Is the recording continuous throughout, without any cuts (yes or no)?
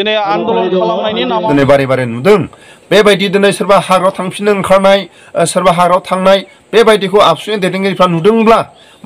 no